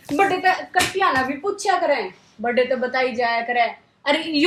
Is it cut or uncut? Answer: uncut